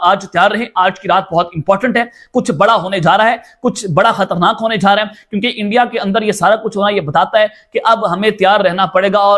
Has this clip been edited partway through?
no; 0 cuts

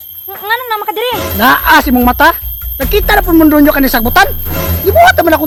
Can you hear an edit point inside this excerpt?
no; 0 cuts

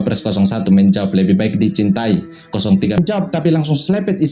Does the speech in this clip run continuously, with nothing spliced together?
no; 1 cut; at 3.0 s

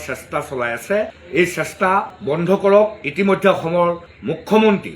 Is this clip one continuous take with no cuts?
yes; 0 cuts

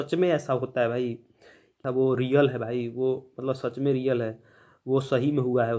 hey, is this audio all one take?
no; 1 cut; at 1.8 s

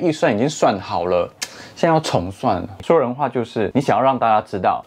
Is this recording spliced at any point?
yes; 1 cut; at 2.8 s

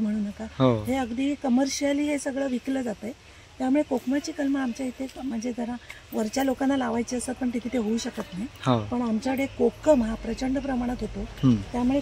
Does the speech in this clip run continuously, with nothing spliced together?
yes; 0 cuts

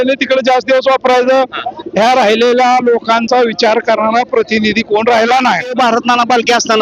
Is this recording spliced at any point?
yes; 1 cut; at 5.7 s

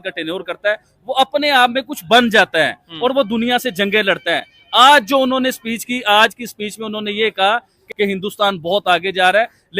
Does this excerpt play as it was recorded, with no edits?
no; 1 cut; at 7.8 s

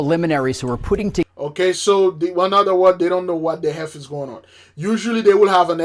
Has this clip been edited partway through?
no; 0 cuts

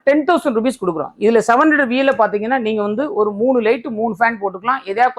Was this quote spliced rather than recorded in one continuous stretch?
no; 0 cuts

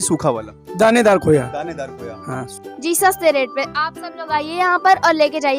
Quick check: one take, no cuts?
no; 1 cut; at 2.5 s

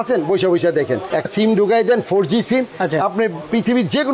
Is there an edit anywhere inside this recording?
yes; 1 cut; at 1.2 s

